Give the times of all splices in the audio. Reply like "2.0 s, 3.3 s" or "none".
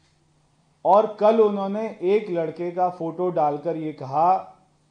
none